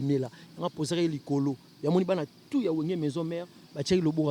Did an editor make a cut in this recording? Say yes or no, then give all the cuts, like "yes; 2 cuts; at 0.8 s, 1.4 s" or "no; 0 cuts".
no; 0 cuts